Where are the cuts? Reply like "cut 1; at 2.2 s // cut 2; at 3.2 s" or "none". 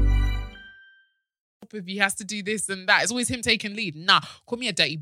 cut 1; at 1.5 s